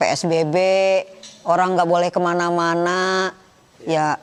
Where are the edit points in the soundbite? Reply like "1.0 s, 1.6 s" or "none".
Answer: none